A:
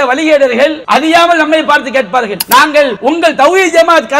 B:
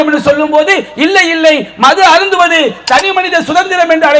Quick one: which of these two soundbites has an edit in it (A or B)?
A